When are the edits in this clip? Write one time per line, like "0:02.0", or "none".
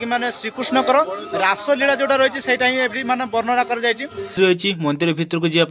0:04.3